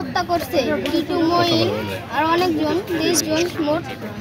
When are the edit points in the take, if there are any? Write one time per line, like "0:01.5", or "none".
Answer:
none